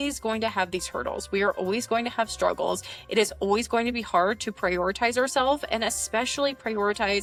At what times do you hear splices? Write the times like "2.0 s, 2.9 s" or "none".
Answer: none

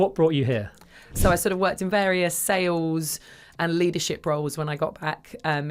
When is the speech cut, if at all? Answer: 1.1 s

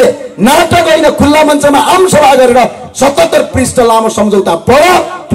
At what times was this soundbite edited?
none

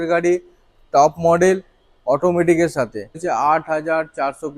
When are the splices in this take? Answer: 3.2 s

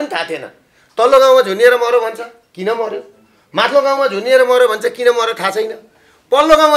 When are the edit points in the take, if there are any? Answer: none

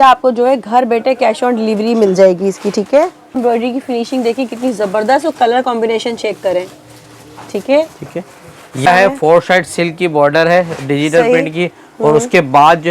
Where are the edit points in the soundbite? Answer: 3.4 s, 8.8 s

